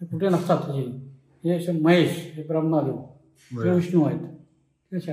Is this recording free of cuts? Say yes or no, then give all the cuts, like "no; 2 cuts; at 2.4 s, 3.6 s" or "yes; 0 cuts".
yes; 0 cuts